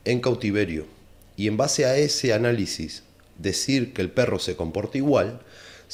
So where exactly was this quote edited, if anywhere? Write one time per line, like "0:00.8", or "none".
none